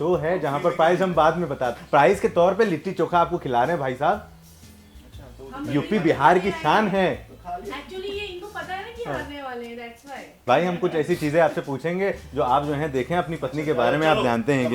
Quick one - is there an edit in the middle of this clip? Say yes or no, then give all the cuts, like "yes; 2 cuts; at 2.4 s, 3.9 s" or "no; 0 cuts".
no; 0 cuts